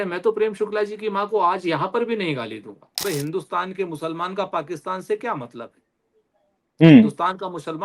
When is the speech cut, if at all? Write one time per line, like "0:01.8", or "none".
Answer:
0:02.9